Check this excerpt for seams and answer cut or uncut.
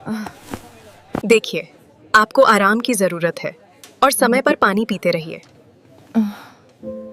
cut